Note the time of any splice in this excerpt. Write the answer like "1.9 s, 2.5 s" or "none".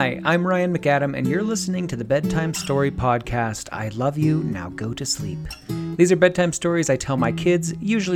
none